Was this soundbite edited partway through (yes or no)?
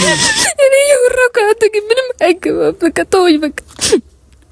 no